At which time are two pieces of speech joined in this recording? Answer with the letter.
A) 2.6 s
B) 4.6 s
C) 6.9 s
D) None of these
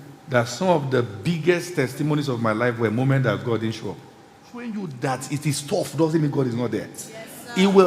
B